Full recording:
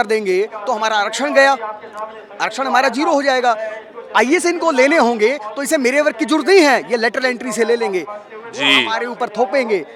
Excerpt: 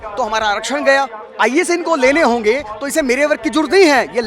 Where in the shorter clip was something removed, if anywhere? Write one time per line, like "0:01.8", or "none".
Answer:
0:01.2